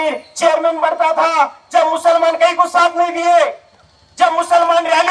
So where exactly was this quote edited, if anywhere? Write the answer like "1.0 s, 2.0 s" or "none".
none